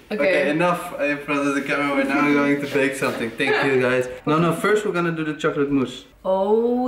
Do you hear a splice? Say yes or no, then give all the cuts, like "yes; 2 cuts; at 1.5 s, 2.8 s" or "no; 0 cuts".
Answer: no; 0 cuts